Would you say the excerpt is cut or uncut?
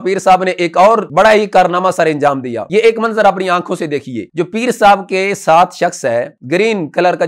cut